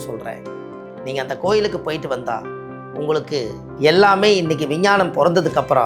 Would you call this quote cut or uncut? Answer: cut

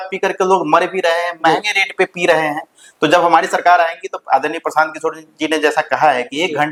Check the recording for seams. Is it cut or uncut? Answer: uncut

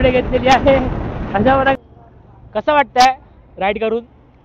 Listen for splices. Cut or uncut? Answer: cut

